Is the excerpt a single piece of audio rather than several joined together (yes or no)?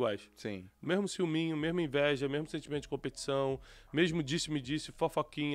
yes